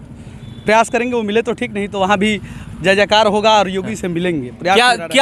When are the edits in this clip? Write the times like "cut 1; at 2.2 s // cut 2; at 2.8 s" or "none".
none